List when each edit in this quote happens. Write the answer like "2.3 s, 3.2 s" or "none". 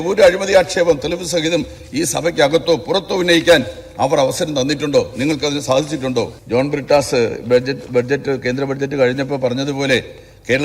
6.4 s